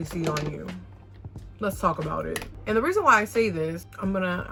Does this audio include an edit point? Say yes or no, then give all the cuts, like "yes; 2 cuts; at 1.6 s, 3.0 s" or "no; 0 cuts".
no; 0 cuts